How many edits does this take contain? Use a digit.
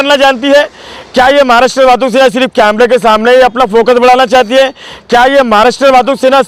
0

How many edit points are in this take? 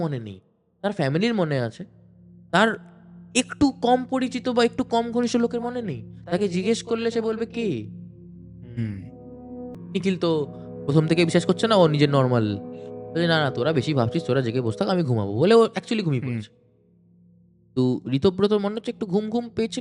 1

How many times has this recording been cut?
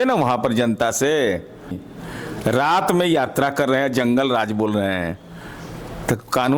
1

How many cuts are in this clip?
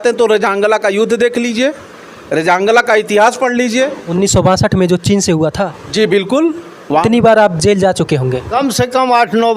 1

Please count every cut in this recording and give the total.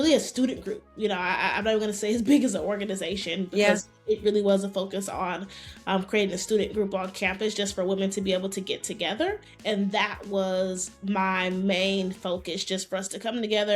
1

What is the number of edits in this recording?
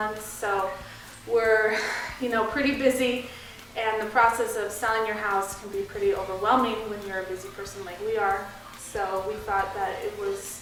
0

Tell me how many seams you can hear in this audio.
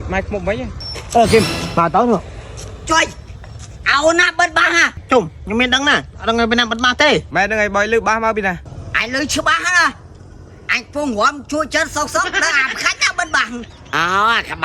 1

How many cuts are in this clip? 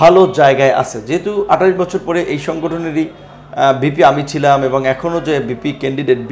0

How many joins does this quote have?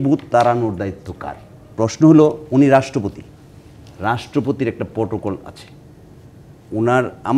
2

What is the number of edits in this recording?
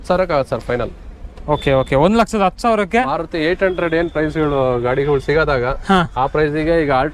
0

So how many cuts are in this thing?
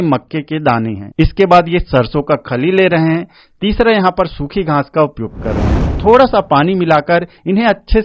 2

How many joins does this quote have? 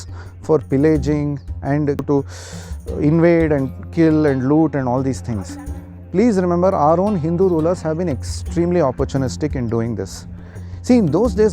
1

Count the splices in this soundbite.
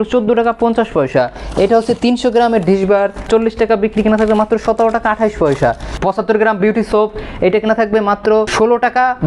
3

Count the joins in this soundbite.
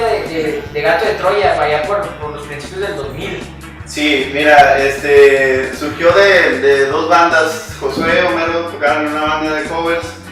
1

